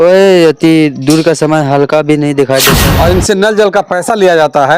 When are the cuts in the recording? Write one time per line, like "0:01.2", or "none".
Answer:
0:02.8